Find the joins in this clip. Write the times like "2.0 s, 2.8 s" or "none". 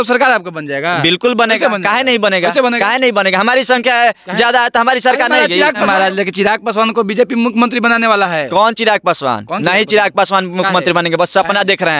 5.8 s